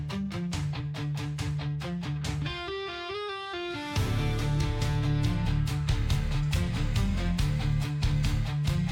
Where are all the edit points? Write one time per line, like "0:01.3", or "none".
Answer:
none